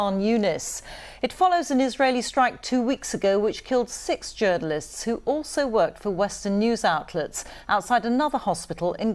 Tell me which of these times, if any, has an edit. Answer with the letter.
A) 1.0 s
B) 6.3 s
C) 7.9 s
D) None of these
B